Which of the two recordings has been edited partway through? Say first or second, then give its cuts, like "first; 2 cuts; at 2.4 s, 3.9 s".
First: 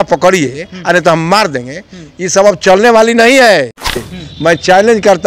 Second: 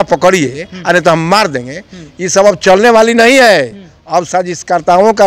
first; 1 cut; at 4.0 s